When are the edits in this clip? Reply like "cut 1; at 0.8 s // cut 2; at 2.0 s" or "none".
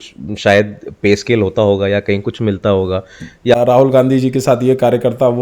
cut 1; at 3.5 s